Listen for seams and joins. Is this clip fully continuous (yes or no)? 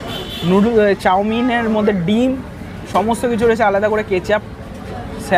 yes